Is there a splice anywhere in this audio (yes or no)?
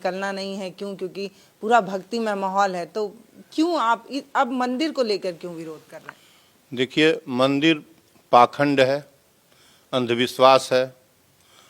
no